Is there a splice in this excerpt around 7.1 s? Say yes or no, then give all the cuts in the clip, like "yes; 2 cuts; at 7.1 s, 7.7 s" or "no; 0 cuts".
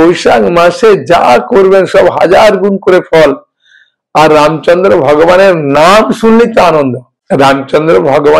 yes; 1 cut; at 7.1 s